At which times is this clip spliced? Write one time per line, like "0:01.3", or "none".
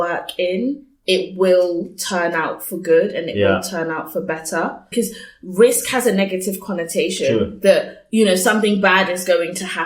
0:04.9